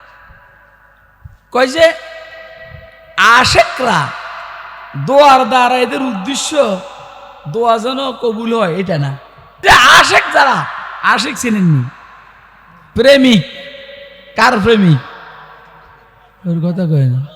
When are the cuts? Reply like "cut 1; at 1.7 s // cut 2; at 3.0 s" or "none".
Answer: cut 1; at 9.6 s

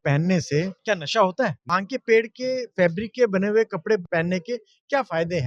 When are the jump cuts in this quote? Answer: cut 1; at 1.7 s

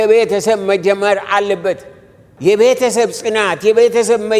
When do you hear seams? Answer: cut 1; at 2.2 s

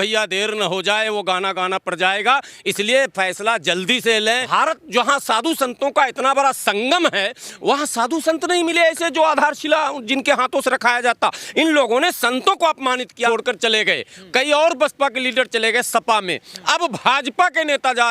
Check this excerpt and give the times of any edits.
cut 1; at 4.5 s // cut 2; at 13.3 s

